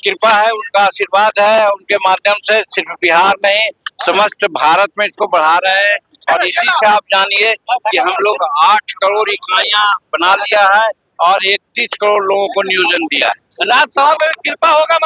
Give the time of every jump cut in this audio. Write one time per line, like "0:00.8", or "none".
none